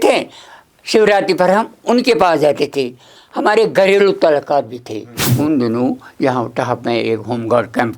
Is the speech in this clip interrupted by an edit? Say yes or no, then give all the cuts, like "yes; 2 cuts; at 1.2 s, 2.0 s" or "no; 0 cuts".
yes; 1 cut; at 5.3 s